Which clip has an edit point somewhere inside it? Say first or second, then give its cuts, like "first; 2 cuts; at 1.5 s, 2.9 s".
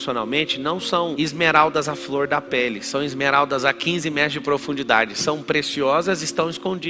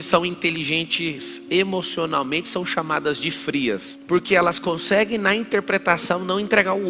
second; 1 cut; at 3.9 s